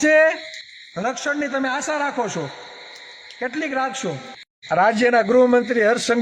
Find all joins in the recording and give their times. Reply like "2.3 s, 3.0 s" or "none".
4.5 s

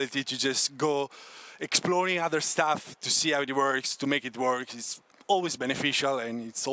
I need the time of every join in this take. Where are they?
none

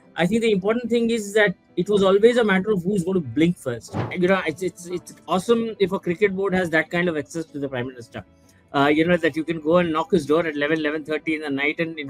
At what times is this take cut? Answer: 4.1 s

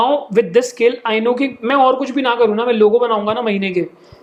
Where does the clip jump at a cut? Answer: none

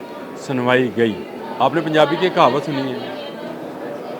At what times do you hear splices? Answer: 1.4 s

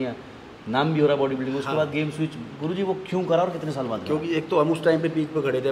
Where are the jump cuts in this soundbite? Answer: none

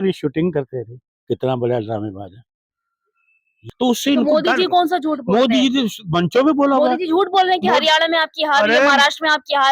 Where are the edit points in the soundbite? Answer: 3.5 s

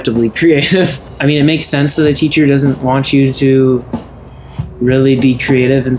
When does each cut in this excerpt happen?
1.1 s

